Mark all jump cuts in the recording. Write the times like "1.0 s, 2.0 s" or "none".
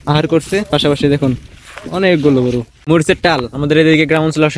2.7 s